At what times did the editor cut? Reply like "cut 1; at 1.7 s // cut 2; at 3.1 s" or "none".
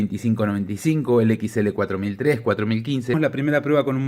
cut 1; at 3.1 s